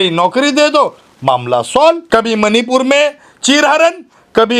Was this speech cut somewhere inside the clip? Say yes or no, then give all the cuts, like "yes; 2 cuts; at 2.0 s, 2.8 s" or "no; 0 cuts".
yes; 1 cut; at 2.0 s